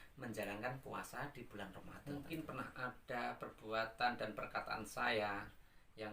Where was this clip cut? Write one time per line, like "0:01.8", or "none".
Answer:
0:01.9